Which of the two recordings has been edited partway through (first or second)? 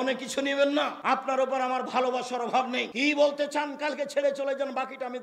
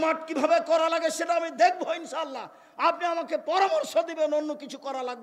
first